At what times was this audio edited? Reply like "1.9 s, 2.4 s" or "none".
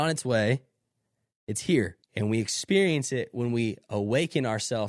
2.0 s